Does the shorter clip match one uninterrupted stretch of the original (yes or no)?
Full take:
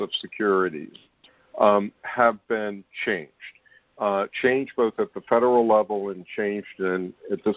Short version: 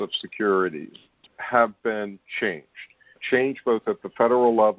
no